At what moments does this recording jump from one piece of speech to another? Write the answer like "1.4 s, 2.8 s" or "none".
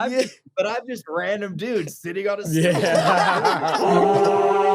3.8 s